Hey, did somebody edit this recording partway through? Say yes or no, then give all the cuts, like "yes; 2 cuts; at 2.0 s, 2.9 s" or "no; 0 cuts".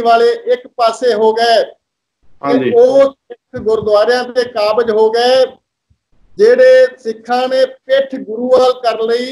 no; 0 cuts